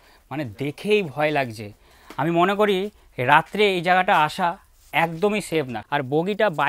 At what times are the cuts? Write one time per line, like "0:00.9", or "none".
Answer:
0:05.8